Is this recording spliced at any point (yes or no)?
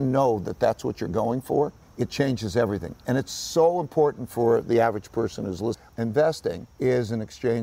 yes